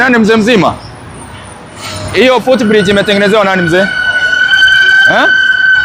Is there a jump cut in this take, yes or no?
no